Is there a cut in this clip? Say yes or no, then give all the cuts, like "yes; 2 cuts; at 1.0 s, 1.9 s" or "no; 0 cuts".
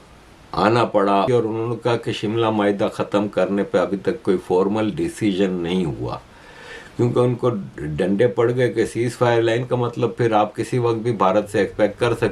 yes; 1 cut; at 1.3 s